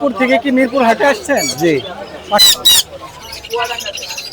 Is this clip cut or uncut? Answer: cut